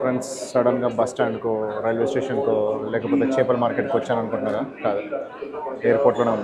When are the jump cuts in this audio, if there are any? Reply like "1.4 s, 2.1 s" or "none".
none